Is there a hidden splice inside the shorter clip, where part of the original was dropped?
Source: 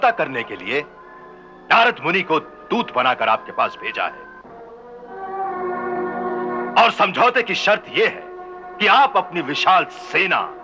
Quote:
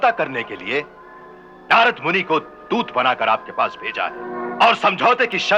yes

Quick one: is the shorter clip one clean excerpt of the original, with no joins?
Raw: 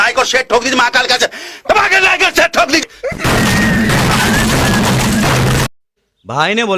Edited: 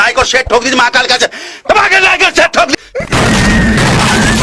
no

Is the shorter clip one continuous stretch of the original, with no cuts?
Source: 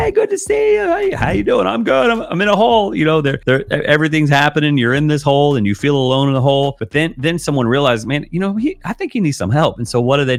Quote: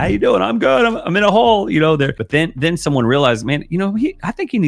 no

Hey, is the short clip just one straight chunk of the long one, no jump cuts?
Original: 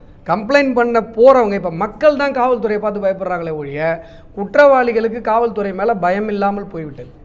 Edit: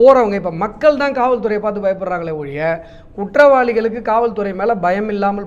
yes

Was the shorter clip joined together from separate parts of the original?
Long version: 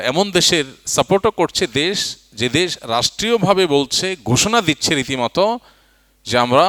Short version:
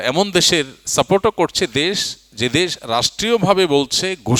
no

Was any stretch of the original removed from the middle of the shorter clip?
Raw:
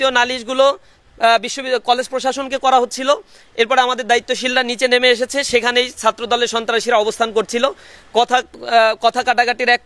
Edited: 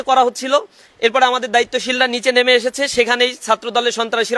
no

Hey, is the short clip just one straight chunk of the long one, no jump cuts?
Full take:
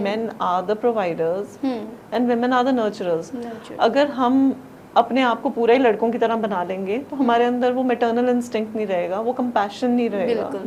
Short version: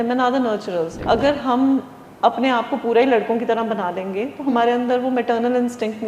no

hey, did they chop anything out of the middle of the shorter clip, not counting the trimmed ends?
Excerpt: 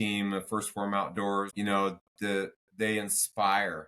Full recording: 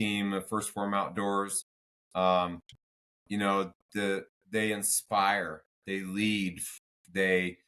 yes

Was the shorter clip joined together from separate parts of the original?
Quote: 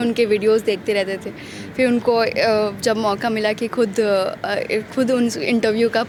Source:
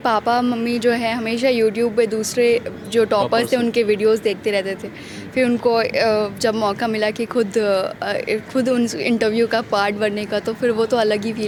no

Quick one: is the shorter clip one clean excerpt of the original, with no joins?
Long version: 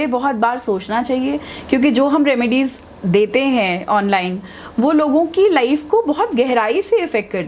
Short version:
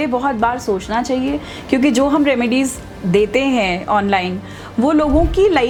yes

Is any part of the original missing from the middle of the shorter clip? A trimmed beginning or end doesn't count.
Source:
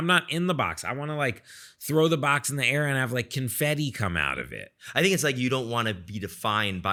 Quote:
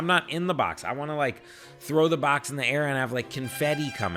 no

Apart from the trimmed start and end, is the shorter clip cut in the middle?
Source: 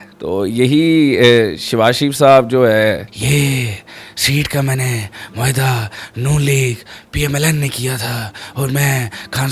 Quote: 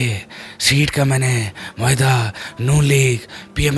no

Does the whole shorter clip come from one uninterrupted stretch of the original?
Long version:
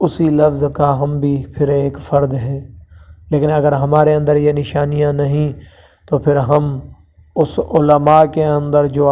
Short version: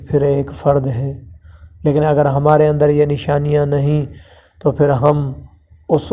yes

